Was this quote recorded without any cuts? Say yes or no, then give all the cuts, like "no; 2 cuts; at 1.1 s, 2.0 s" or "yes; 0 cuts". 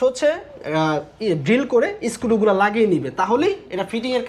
yes; 0 cuts